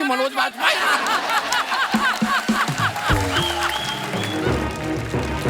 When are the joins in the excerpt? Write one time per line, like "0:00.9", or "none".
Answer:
0:04.0